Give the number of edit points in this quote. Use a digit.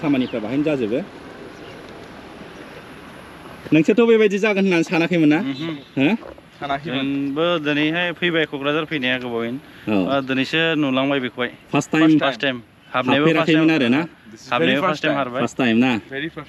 0